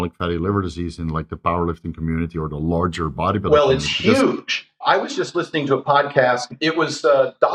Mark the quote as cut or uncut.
cut